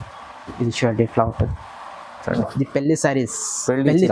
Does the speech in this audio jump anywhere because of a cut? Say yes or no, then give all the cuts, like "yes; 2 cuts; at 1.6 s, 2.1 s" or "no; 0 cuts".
yes; 1 cut; at 2.4 s